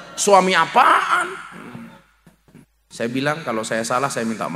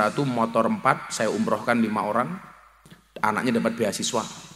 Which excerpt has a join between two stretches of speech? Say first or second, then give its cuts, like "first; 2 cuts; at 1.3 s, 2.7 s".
first; 1 cut; at 2.7 s